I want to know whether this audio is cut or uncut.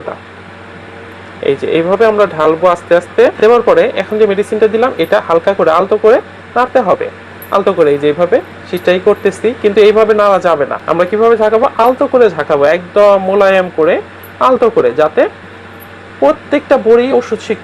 cut